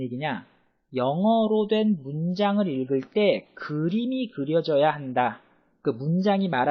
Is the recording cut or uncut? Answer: cut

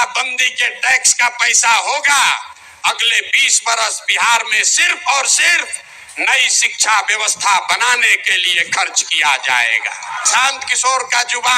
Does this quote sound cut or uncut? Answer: cut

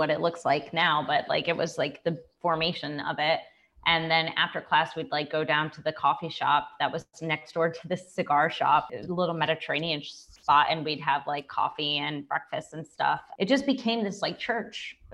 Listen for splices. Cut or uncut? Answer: uncut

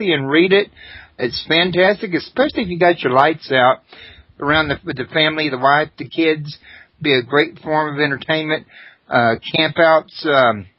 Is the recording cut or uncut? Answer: cut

